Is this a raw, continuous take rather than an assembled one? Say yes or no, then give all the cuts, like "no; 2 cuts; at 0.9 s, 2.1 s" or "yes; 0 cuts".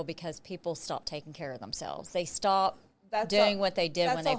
yes; 0 cuts